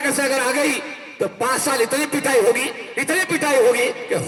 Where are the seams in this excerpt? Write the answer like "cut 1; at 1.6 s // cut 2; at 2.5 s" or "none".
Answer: none